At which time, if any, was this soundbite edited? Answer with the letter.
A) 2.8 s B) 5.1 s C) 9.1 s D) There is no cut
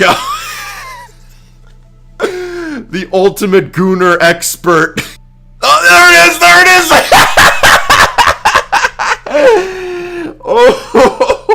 B